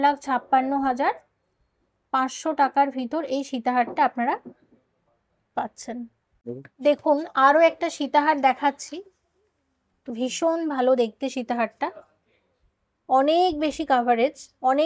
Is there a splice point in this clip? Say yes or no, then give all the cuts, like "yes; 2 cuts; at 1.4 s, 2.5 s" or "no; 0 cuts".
no; 0 cuts